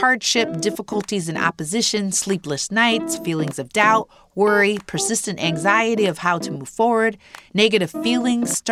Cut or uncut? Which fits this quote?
uncut